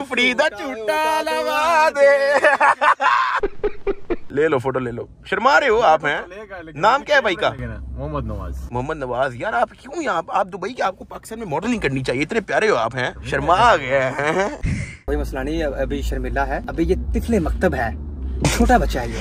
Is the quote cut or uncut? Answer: uncut